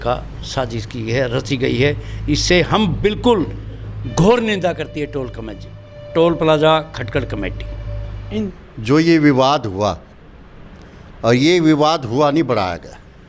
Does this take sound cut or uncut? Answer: cut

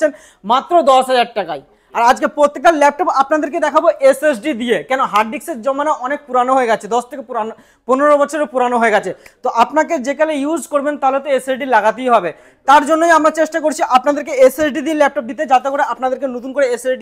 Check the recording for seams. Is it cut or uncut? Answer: uncut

